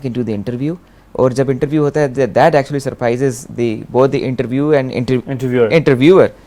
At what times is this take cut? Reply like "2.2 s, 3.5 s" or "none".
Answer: none